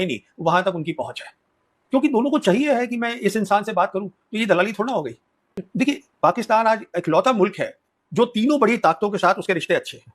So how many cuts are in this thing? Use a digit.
1